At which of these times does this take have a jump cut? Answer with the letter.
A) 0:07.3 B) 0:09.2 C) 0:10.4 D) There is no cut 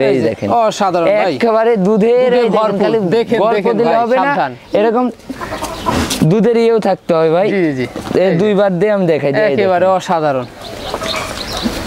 D